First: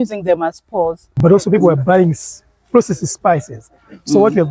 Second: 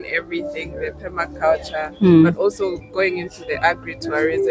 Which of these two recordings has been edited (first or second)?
first